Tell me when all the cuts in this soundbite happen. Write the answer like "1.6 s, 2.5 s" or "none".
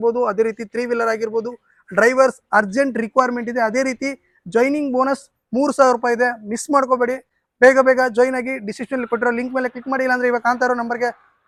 none